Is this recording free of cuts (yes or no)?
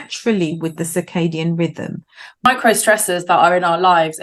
no